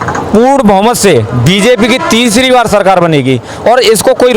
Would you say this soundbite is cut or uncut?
uncut